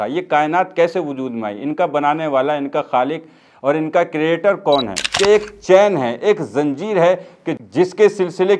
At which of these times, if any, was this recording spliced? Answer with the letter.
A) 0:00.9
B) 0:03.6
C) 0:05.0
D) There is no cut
C